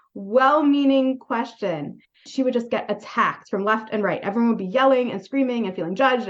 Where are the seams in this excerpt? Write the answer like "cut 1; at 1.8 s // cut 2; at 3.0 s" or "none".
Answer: none